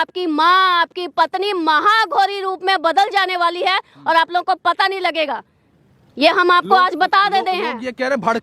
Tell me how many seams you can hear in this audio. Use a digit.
0